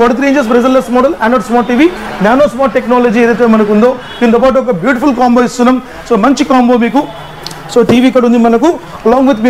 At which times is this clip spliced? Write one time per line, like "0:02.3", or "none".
none